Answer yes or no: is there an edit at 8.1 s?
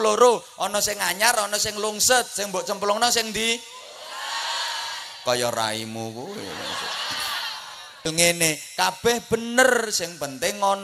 yes